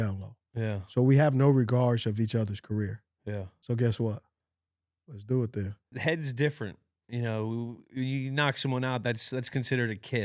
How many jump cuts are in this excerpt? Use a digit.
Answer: 2